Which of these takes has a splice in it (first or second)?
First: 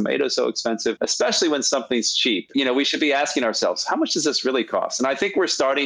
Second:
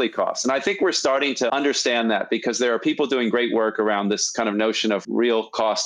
first